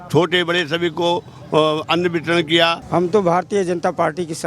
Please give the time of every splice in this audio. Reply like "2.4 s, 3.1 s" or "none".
2.8 s